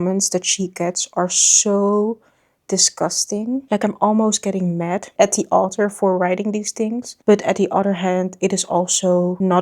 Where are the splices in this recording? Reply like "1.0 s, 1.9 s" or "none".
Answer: none